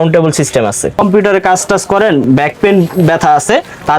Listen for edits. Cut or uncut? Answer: cut